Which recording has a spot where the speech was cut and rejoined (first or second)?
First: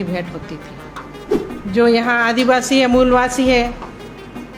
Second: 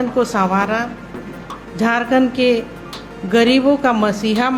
first